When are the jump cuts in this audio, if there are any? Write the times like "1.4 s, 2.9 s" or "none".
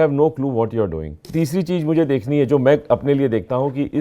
1.3 s